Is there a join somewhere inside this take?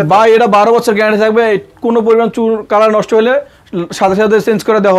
no; 0 cuts

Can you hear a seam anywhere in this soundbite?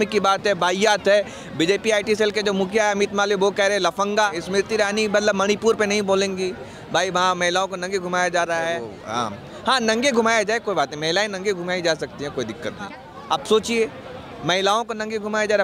yes; 3 cuts; at 4.4 s, 8.9 s, 12.9 s

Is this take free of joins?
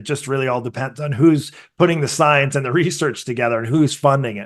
yes; 0 cuts

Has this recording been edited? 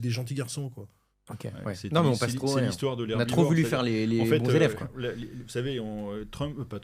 no; 0 cuts

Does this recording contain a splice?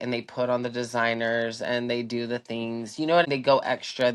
yes; 1 cut; at 3.2 s

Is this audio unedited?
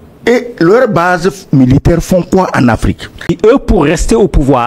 no; 1 cut; at 3.3 s

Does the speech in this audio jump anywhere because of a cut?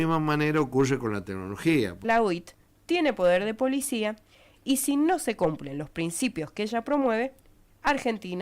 yes; 1 cut; at 2.0 s

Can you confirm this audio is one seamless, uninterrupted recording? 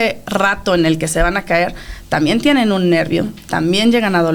yes; 0 cuts

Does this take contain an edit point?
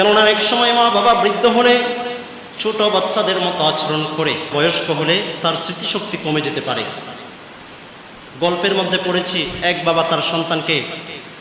yes; 1 cut; at 4.5 s

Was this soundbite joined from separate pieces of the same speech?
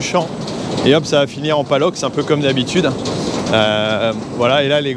no; 0 cuts

